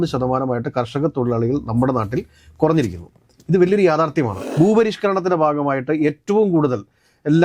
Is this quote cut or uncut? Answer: cut